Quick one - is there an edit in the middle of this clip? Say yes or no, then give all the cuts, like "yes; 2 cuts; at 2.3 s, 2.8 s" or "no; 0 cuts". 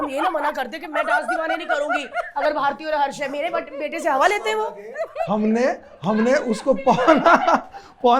no; 0 cuts